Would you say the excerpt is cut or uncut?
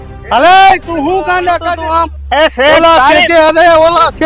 cut